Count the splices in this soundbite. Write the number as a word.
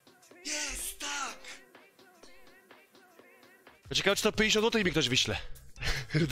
one